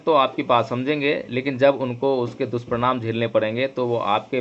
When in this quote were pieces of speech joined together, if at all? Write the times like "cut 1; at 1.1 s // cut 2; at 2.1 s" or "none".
none